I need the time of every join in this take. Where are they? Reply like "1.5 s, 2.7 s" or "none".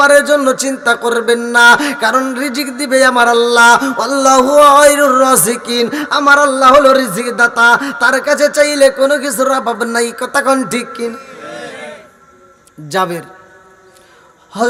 none